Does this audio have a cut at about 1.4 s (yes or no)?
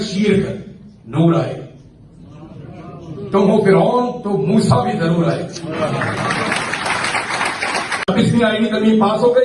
no